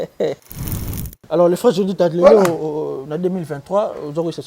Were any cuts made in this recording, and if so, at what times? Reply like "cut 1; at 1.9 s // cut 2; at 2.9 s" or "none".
cut 1; at 0.9 s